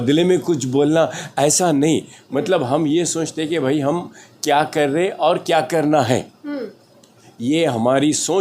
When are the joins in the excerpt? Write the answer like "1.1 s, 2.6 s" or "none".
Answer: none